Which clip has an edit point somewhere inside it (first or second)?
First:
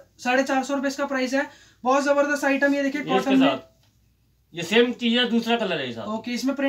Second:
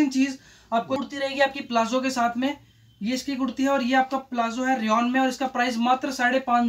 second